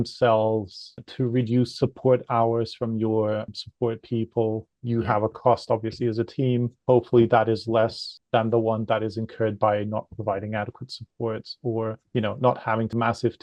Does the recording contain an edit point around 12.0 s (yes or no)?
no